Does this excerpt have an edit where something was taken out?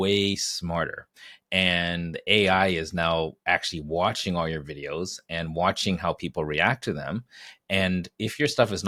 no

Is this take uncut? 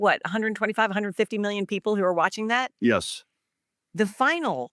yes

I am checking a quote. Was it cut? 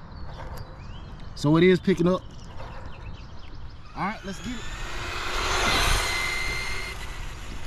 yes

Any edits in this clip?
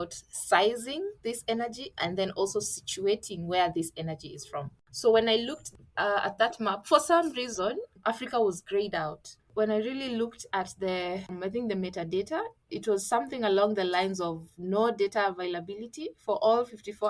yes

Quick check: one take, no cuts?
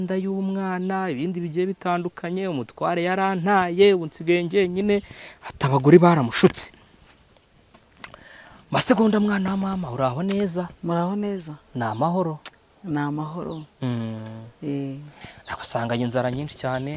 yes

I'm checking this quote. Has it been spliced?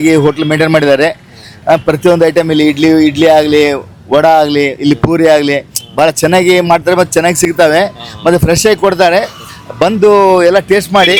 no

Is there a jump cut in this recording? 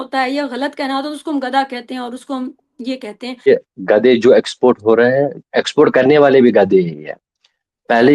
yes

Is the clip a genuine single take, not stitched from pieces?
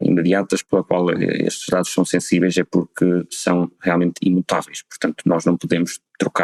yes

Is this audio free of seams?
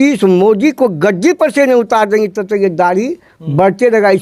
yes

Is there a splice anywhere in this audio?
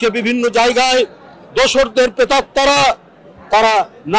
no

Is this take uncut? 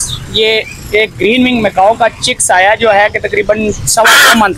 yes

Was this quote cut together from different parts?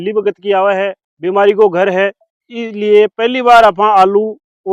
yes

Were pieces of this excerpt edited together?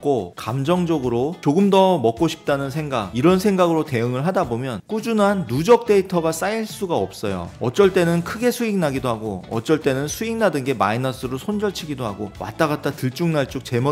yes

